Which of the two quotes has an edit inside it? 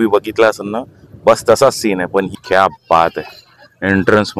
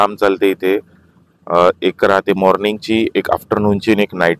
first; 1 cut; at 2.4 s

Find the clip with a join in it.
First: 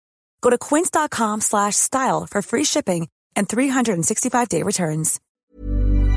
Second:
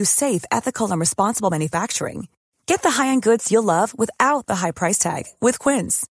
first; 1 cut; at 5.2 s

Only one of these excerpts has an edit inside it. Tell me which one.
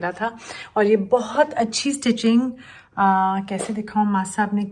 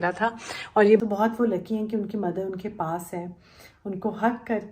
second; 1 cut; at 1.0 s

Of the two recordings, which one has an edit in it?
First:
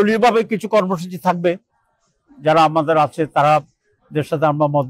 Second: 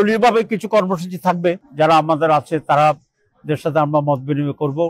second; 1 cut; at 1.6 s

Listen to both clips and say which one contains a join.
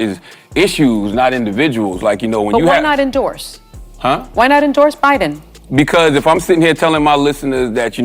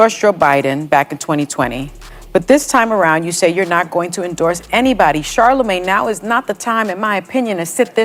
first; 1 cut; at 6.6 s

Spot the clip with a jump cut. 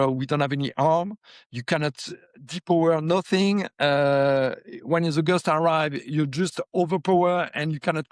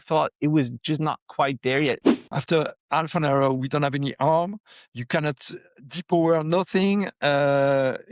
second; 1 cut; at 2.0 s

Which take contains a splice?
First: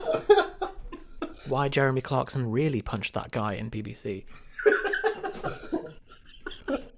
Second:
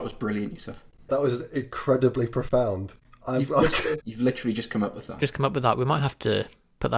second; 2 cuts; at 1.1 s, 4.1 s

